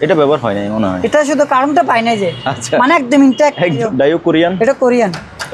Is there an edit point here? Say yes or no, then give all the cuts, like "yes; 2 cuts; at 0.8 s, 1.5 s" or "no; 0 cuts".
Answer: yes; 1 cut; at 3.8 s